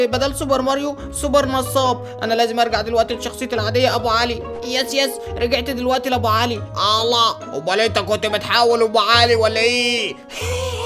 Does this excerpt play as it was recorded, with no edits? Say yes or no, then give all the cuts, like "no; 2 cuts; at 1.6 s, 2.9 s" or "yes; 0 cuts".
yes; 0 cuts